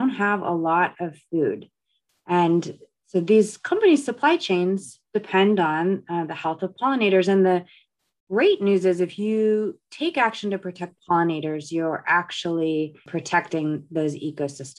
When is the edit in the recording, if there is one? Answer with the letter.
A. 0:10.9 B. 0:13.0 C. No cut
B